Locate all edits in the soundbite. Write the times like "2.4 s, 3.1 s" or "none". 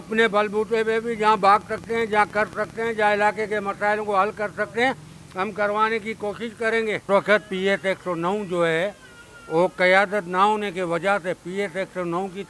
7.0 s